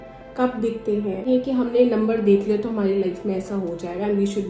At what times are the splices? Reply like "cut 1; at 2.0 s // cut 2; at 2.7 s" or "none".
cut 1; at 1.3 s